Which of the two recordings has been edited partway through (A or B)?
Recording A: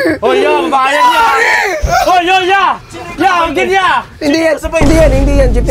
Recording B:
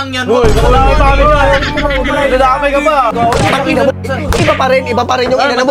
B